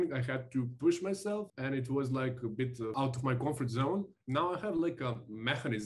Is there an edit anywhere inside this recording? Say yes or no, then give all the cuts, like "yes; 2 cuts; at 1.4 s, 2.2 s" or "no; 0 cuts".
yes; 3 cuts; at 1.5 s, 2.9 s, 4.2 s